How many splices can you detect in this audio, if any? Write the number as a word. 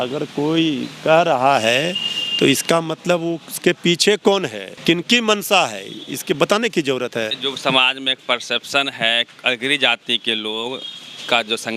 two